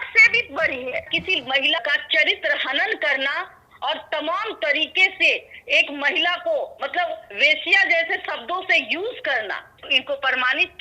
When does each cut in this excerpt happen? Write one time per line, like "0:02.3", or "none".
0:01.1
0:09.8